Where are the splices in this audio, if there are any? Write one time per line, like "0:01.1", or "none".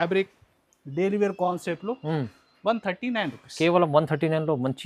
none